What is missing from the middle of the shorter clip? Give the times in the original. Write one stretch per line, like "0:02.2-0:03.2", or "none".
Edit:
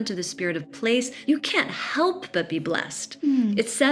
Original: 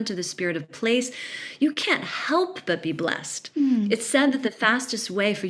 0:01.1-0:01.5